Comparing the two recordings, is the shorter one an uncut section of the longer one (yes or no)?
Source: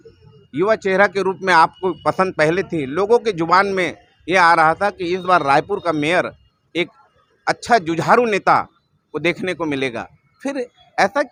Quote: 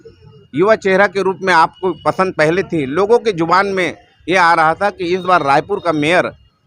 yes